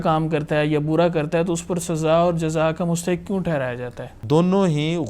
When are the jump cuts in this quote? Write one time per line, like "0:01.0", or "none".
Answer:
0:04.2